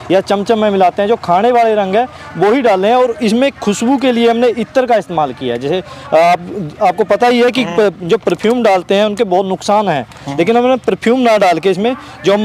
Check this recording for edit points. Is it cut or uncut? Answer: uncut